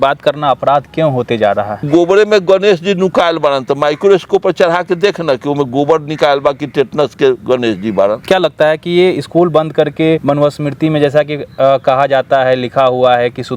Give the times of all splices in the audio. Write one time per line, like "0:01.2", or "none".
0:01.9
0:08.2
0:10.2